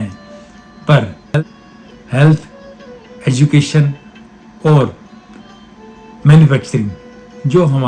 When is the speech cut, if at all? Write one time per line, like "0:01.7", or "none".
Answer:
none